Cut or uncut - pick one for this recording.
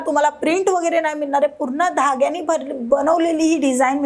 uncut